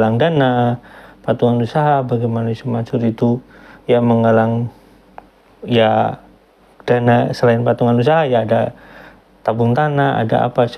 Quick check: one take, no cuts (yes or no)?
yes